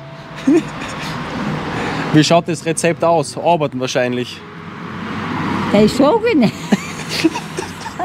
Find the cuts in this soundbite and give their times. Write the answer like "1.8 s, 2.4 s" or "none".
none